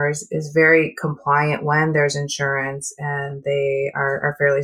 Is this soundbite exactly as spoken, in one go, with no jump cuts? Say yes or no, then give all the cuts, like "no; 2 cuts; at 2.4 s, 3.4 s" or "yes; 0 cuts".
yes; 0 cuts